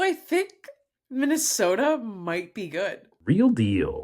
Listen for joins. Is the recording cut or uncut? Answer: cut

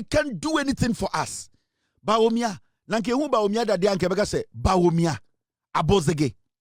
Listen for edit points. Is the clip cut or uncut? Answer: uncut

